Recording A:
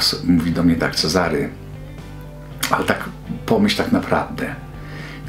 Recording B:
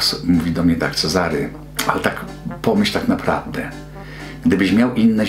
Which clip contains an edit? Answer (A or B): B